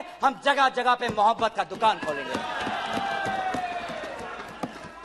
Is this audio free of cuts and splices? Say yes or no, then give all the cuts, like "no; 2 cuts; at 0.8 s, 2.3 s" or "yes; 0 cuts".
yes; 0 cuts